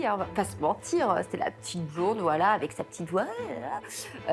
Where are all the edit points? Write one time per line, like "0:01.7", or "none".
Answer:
none